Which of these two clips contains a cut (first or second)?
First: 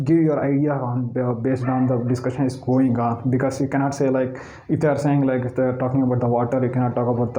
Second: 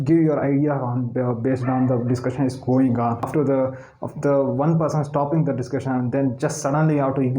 second